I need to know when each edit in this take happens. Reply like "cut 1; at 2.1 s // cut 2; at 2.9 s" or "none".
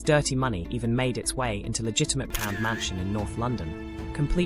cut 1; at 2.3 s